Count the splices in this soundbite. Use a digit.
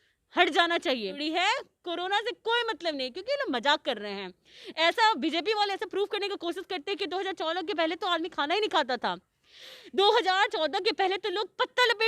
1